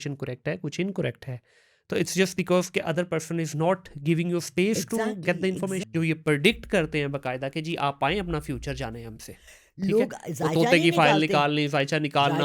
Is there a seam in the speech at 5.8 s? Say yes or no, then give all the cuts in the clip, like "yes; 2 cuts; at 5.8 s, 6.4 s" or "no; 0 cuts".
yes; 1 cut; at 5.8 s